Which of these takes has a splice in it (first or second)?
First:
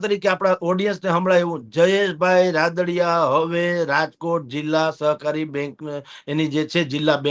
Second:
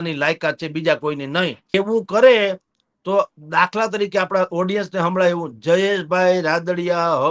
second